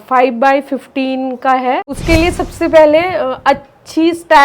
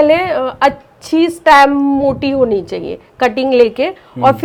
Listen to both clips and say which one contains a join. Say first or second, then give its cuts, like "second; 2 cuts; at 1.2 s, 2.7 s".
first; 1 cut; at 1.9 s